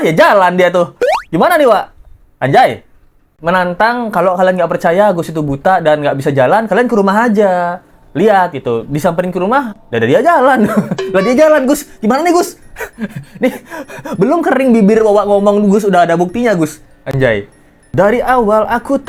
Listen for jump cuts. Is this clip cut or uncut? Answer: uncut